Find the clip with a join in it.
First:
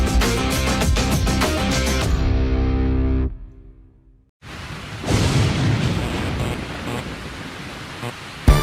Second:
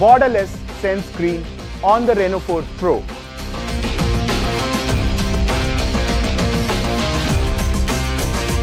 first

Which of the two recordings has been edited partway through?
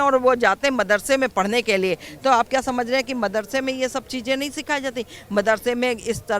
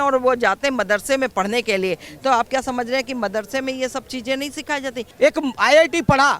second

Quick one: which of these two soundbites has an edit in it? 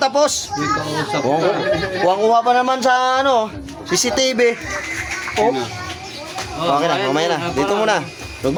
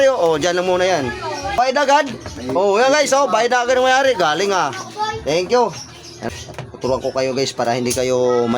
second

